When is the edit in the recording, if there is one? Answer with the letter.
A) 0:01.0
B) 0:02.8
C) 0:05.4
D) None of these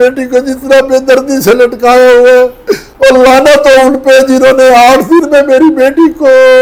D